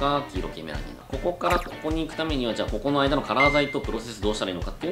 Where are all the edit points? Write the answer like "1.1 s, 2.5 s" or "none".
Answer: none